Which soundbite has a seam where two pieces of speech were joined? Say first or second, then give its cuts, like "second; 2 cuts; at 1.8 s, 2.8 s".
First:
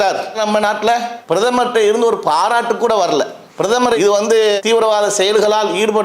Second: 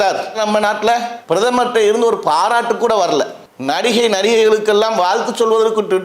second; 1 cut; at 3.4 s